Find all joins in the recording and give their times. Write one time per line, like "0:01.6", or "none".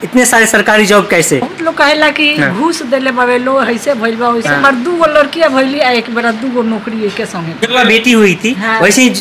0:01.5
0:04.6
0:07.7

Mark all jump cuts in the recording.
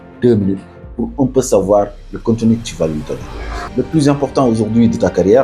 0:03.6

